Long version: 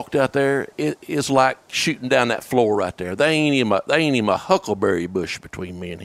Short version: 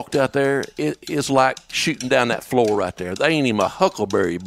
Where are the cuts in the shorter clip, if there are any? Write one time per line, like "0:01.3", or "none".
0:03.1